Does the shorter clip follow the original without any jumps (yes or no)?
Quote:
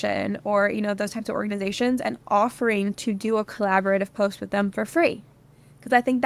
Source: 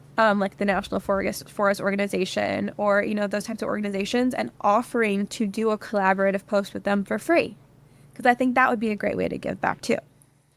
yes